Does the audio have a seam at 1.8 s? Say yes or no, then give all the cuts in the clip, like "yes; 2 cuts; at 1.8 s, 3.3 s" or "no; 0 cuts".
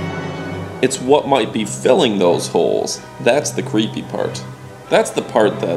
yes; 1 cut; at 1.8 s